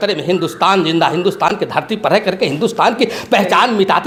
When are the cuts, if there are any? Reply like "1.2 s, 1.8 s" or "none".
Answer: none